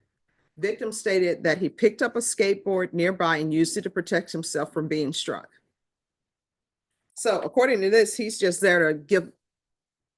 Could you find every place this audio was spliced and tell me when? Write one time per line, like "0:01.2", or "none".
none